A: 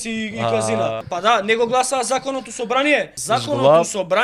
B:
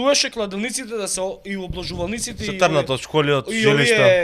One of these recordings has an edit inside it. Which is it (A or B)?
A